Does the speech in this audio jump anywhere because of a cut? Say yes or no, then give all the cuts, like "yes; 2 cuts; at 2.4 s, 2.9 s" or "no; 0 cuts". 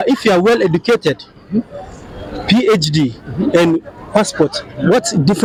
no; 0 cuts